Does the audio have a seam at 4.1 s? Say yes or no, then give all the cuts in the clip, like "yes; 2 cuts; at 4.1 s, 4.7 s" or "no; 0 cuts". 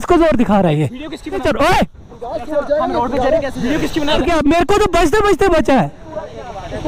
yes; 2 cuts; at 1.2 s, 4.1 s